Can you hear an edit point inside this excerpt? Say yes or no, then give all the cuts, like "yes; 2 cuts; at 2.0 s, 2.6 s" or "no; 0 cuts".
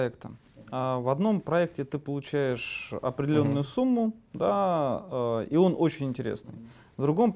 no; 0 cuts